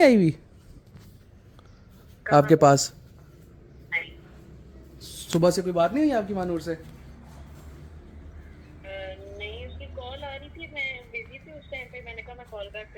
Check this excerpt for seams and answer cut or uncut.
uncut